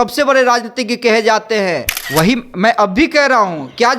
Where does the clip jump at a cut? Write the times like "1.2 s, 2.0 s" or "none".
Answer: 1.9 s

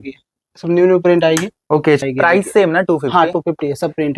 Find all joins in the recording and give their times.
2.0 s

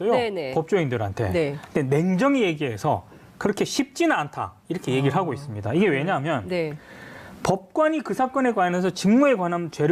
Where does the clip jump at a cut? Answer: 3.1 s

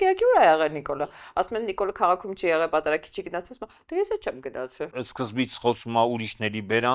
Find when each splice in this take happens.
4.9 s

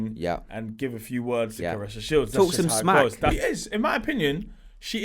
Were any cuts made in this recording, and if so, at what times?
3.4 s

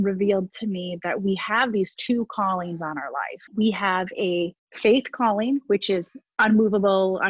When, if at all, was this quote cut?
3.4 s, 4.6 s

